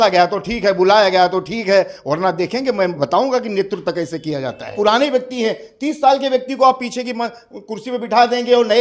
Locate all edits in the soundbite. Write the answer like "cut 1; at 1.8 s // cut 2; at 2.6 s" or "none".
cut 1; at 4.7 s